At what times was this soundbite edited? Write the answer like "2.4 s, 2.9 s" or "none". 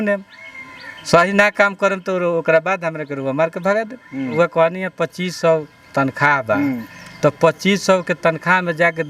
4.3 s